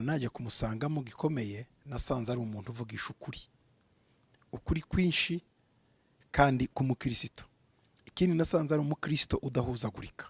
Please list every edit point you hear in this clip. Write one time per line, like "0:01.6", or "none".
none